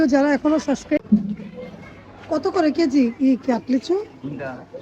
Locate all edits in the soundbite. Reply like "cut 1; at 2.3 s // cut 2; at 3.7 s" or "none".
cut 1; at 1.0 s